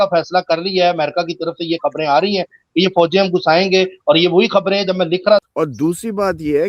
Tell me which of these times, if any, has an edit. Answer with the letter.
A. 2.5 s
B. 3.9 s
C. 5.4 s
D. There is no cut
C